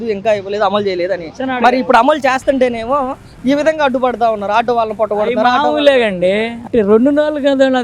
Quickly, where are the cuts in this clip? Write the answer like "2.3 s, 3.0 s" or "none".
6.6 s